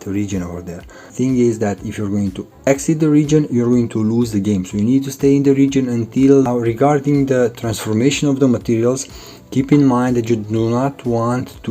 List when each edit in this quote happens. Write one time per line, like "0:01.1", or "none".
0:01.1
0:06.5